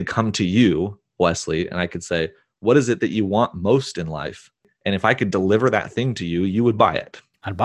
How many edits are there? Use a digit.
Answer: 1